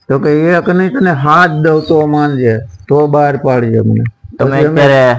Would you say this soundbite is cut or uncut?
uncut